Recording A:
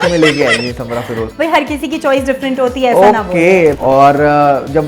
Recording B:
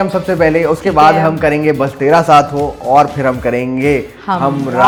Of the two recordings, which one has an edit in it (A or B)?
A